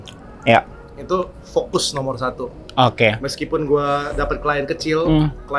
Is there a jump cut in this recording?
yes; 1 cut; at 2.6 s

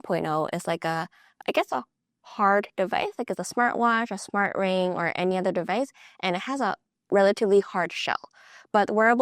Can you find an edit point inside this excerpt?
yes; 1 cut; at 1.4 s

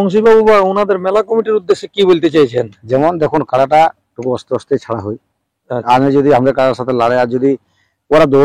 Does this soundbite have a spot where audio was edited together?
no; 0 cuts

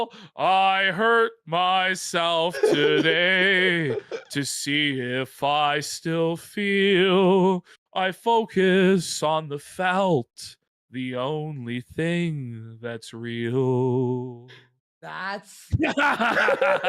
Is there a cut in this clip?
yes; 1 cut; at 15.2 s

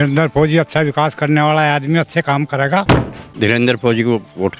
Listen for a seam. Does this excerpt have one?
yes; 1 cut; at 3.0 s

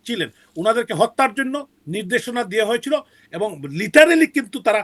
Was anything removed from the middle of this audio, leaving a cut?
no; 0 cuts

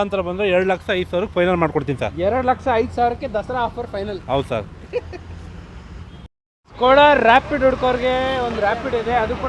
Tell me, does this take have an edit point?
no; 0 cuts

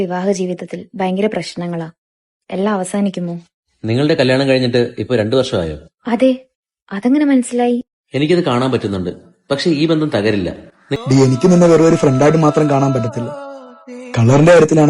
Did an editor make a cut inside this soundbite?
yes; 1 cut; at 11.0 s

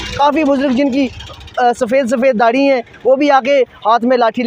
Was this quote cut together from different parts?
no; 0 cuts

